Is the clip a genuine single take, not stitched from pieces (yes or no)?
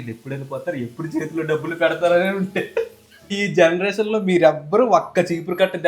no